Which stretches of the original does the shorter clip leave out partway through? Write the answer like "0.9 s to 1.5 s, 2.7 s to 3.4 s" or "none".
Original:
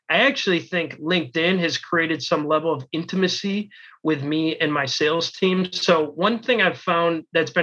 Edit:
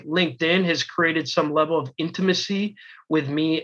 none

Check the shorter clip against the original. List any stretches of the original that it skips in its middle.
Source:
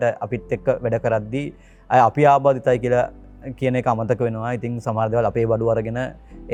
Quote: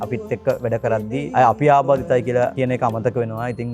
1.5 s to 1.8 s, 3.1 s to 3.6 s

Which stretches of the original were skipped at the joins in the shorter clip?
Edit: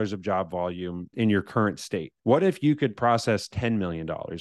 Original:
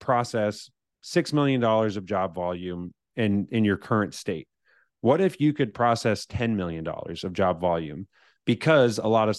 3.0 s to 3.5 s, 4.5 s to 4.9 s

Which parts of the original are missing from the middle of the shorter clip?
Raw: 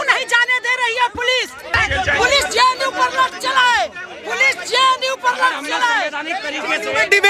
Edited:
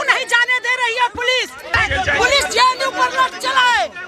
none

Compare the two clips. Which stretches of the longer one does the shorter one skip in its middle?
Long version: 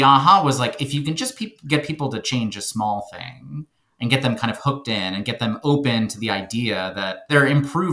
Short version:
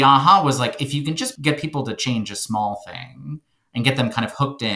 1.3 s to 1.6 s

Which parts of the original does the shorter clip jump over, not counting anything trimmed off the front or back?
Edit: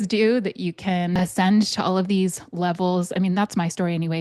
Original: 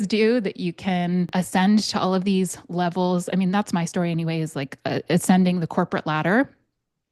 1.1 s to 1.3 s

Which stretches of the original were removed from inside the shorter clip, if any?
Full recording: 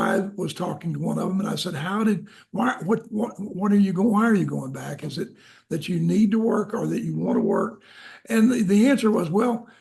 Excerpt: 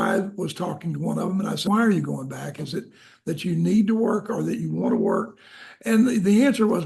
1.7 s to 4.1 s

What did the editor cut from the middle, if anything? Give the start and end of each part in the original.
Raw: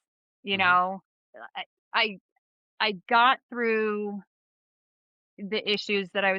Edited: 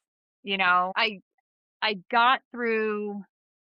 0.9 s to 1.9 s

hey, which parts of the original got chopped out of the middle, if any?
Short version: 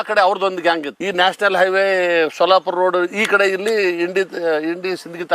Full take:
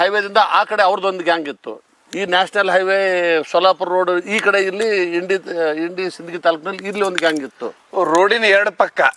1.5 s to 2.0 s

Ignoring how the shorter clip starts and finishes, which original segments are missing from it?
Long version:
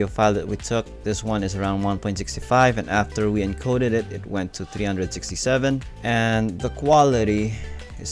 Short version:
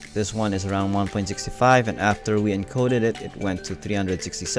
none

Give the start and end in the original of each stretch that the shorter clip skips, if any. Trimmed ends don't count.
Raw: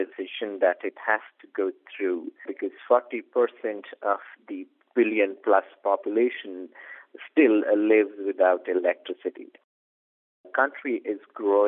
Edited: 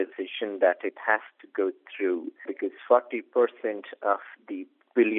none

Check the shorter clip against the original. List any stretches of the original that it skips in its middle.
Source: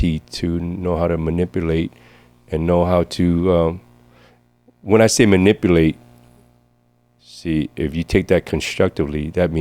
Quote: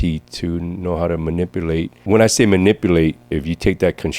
1.9 s to 4.7 s, 6.0 s to 7.7 s

